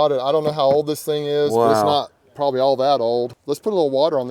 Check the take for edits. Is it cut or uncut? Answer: cut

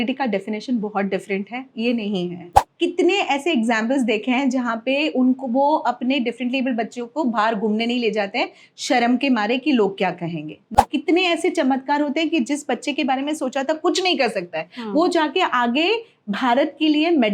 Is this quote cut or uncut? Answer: cut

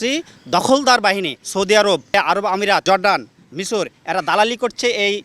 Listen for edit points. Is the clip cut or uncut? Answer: cut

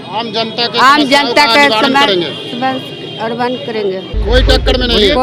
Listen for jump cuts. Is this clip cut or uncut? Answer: uncut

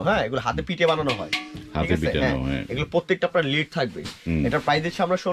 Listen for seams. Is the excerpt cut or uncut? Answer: uncut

